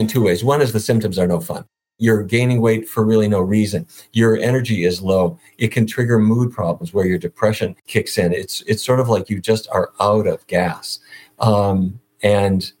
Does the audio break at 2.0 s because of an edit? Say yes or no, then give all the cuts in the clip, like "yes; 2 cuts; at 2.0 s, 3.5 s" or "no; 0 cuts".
yes; 2 cuts; at 2.0 s, 7.8 s